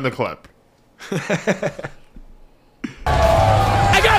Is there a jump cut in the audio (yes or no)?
no